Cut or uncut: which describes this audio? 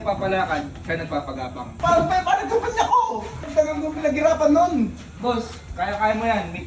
cut